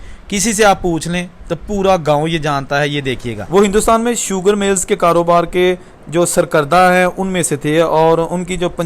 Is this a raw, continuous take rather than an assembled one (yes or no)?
no